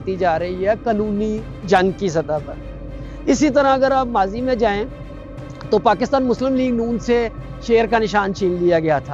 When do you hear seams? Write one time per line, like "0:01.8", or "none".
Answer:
none